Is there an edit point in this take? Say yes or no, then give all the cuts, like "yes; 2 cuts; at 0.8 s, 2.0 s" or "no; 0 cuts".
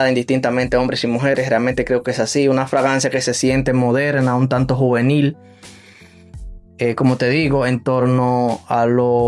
no; 0 cuts